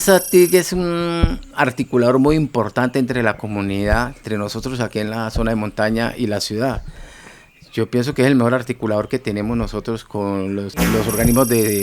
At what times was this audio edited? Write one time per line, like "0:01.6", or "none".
0:04.2
0:10.7